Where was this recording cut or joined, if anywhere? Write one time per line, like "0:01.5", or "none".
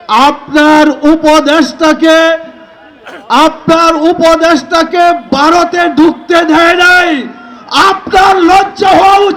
none